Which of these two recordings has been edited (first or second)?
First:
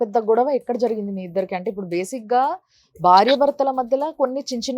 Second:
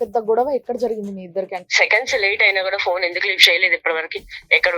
second